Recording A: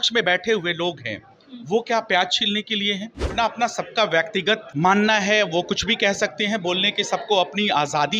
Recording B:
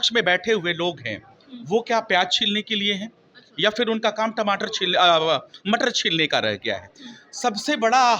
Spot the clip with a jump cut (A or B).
A